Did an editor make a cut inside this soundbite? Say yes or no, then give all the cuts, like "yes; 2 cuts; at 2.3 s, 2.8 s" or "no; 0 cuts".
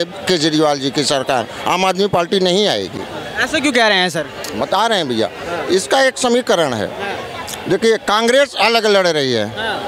no; 0 cuts